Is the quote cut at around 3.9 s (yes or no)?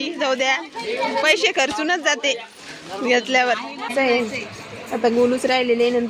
yes